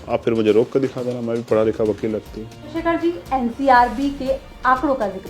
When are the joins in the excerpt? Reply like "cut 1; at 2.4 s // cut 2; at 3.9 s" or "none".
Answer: cut 1; at 2.7 s